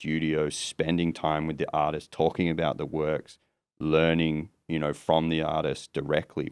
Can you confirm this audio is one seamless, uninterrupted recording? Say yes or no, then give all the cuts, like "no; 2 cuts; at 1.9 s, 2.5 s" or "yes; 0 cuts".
yes; 0 cuts